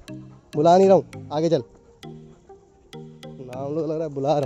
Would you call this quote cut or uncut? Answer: cut